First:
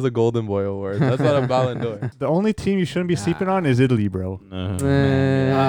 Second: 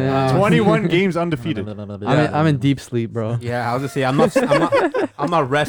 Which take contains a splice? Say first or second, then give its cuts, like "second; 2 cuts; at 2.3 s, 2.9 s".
first; 1 cut; at 2.1 s